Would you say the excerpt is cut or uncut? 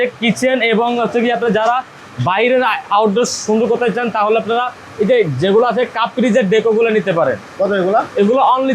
uncut